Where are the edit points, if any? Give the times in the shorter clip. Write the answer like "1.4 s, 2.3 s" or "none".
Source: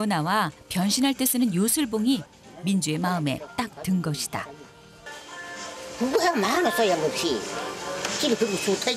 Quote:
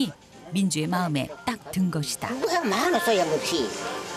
2.3 s